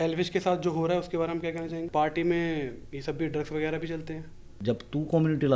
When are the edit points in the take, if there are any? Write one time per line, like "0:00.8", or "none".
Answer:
0:01.8
0:04.6